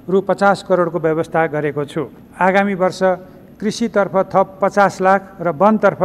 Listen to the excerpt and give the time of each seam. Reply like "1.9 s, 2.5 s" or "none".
2.2 s